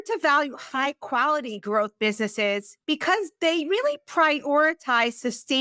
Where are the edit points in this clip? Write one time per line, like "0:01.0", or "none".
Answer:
0:02.7